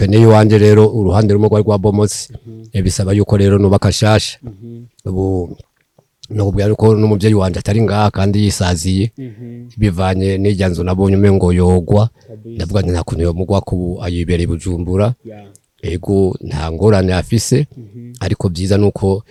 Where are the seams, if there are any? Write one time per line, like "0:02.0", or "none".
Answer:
none